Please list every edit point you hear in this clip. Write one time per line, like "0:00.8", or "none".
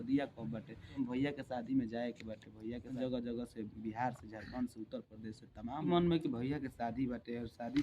0:00.9
0:03.0
0:05.9